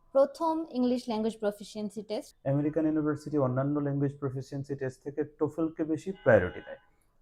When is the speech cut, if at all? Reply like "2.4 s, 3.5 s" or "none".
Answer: 2.3 s